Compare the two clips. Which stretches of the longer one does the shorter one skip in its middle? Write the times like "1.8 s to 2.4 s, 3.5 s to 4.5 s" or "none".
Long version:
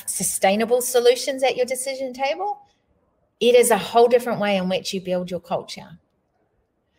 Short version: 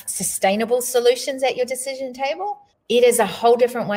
2.7 s to 3.2 s

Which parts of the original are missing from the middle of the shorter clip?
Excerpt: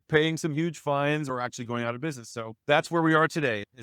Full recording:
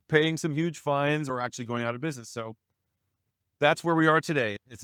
2.5 s to 3.5 s

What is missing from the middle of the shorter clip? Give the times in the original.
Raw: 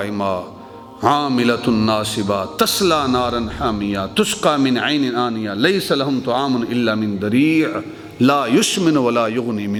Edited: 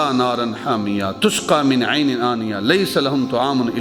none

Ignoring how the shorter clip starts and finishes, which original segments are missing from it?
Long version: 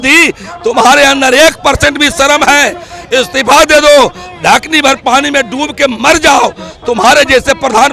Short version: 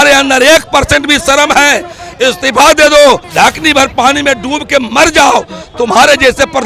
4.2 s to 4.3 s

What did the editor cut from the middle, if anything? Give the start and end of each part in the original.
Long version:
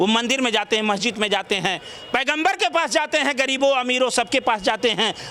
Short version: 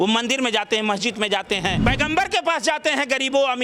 1.8 s to 2.1 s

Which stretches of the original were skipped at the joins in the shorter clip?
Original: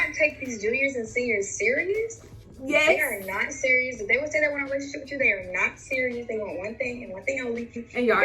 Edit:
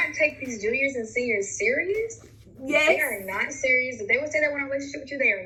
none

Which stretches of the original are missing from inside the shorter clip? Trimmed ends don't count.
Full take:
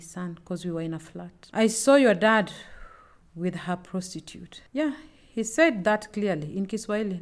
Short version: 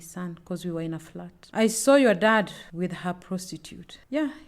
2.6 s to 3.2 s

